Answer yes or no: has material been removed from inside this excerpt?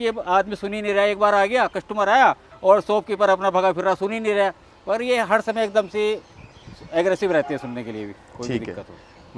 no